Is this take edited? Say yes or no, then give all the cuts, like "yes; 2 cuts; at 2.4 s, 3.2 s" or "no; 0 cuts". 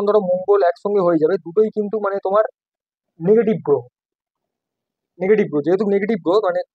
no; 0 cuts